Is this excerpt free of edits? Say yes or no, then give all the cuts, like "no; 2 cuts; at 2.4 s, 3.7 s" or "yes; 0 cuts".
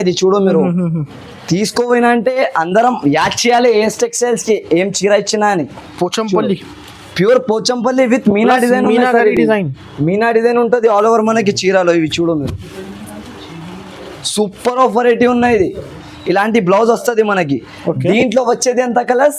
yes; 0 cuts